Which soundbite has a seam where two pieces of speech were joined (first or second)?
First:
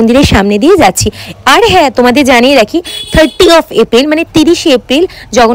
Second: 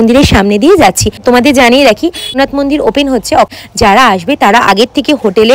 second